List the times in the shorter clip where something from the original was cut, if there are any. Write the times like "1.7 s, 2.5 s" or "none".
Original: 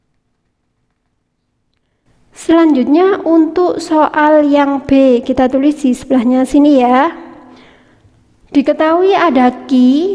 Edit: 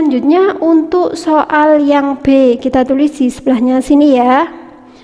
none